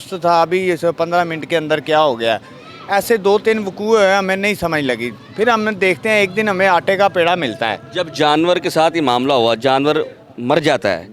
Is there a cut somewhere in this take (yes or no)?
no